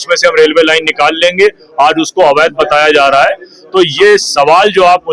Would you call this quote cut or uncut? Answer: uncut